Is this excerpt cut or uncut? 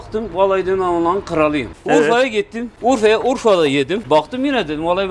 cut